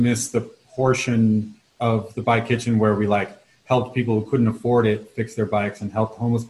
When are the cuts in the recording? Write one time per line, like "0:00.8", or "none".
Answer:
0:01.6